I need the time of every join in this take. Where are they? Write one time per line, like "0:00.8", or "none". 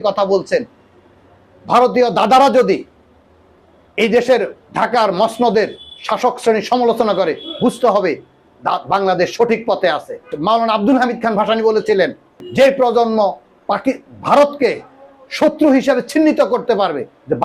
0:10.3
0:12.4